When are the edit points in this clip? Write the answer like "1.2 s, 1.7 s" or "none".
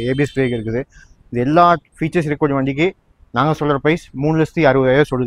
none